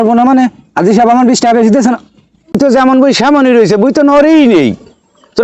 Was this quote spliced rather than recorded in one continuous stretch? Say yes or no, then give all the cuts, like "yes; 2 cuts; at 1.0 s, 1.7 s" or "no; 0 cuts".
yes; 1 cut; at 2.5 s